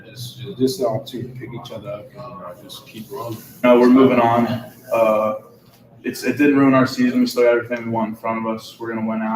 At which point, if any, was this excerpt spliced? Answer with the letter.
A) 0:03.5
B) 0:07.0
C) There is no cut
A